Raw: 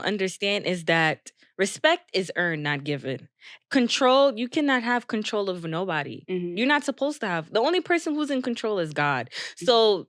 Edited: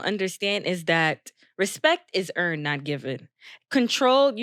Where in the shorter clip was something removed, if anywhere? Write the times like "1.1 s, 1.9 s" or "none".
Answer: none